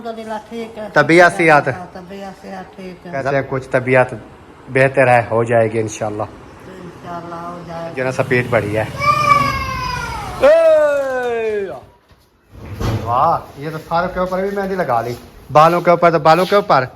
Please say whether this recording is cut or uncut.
cut